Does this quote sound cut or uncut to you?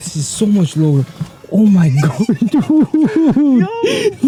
uncut